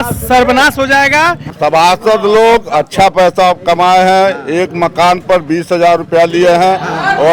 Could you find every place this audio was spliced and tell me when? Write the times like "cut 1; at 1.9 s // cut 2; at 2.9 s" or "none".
cut 1; at 1.5 s